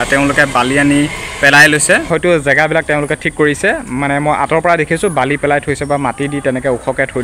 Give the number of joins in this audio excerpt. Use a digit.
1